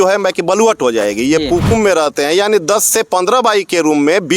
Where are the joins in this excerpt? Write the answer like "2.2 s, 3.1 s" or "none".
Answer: 1.7 s